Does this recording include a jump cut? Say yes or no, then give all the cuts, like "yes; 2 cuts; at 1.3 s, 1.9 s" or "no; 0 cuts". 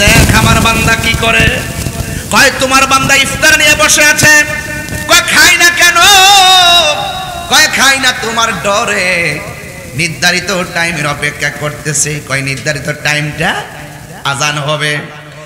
no; 0 cuts